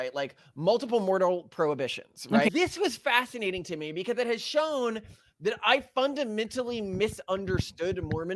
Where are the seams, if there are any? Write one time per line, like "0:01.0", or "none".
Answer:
0:02.5